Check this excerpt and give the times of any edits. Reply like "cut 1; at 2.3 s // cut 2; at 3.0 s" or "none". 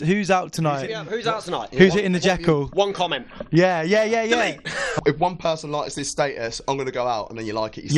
cut 1; at 1.1 s // cut 2; at 4.9 s